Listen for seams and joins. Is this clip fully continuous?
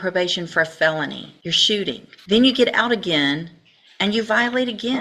no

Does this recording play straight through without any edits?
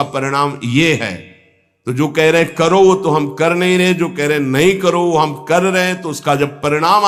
yes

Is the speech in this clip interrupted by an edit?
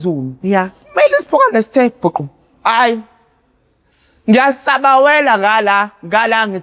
no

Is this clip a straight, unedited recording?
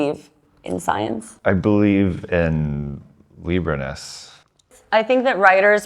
no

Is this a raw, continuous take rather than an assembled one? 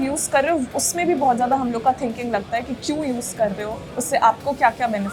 yes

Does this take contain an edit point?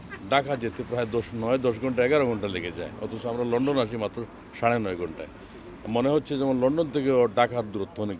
no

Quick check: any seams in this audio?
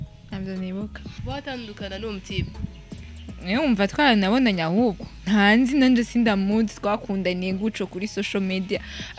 yes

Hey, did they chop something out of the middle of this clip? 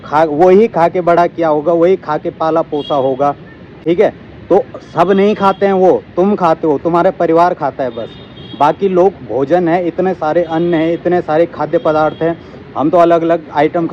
no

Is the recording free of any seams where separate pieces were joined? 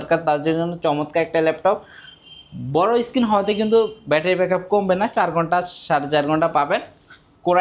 yes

